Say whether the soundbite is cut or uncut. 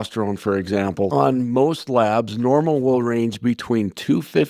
cut